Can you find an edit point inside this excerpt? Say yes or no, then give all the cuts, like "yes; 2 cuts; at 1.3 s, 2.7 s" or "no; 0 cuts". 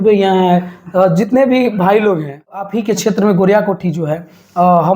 yes; 1 cut; at 2.6 s